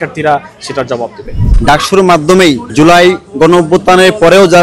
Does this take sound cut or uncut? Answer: cut